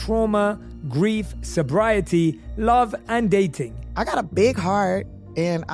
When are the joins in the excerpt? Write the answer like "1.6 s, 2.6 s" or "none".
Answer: none